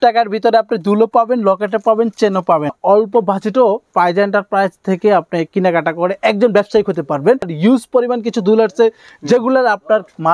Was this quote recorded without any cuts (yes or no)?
no